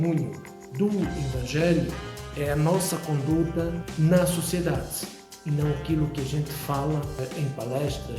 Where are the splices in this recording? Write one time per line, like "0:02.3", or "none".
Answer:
0:03.8
0:07.2

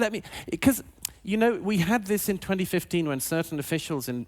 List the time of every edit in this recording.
0:02.0

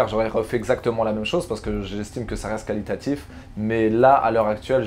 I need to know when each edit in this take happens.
none

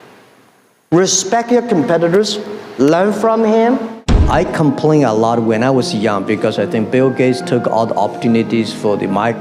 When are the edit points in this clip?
0:04.1

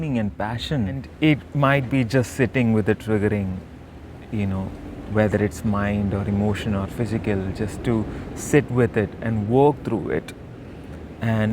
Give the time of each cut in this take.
0:01.1

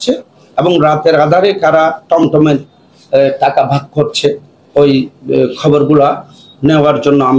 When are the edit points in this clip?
none

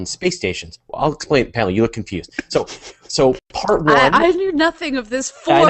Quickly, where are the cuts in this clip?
0:01.2

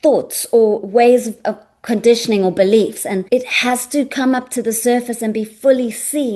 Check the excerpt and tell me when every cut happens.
0:03.2

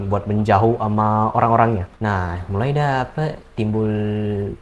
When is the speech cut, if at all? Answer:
0:01.9

